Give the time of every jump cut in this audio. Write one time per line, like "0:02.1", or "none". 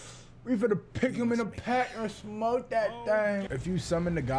0:03.5